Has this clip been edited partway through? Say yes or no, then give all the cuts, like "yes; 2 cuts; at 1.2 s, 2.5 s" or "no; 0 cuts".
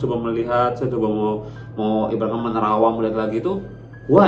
no; 0 cuts